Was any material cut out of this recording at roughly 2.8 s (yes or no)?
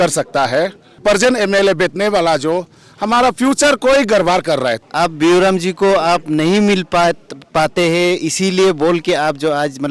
no